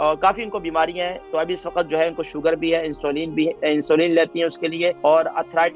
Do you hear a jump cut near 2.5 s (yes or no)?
no